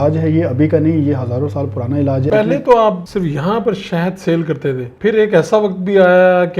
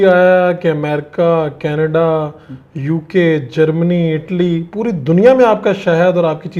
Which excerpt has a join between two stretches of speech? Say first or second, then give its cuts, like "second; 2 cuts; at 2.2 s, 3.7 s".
first; 3 cuts; at 2.3 s, 3.0 s, 4.9 s